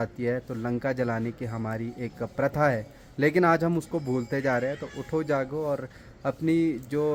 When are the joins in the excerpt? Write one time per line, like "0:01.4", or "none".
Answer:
none